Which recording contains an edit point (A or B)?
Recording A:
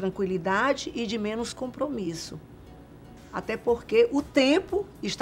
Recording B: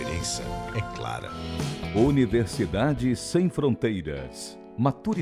B